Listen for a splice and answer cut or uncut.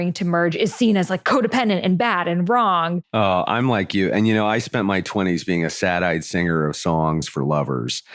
cut